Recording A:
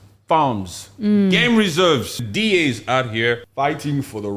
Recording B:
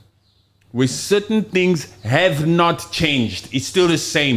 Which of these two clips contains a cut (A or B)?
A